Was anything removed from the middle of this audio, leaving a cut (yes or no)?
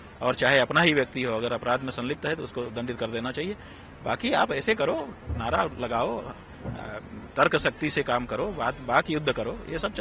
no